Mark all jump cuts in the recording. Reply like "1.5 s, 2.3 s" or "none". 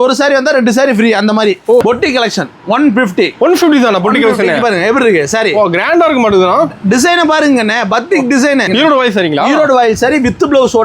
1.8 s, 8.7 s